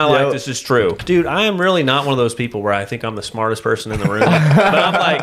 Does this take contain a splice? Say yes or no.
yes